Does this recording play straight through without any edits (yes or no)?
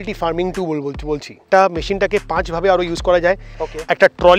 no